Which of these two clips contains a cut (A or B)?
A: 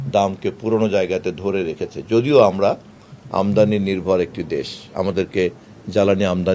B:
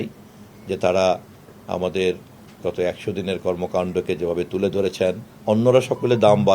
B